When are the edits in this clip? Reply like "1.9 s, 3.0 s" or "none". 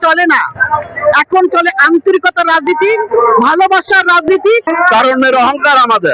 4.7 s